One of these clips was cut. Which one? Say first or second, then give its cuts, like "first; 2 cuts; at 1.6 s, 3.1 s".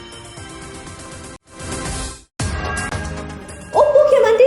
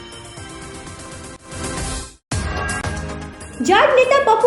second; 2 cuts; at 1.4 s, 2.9 s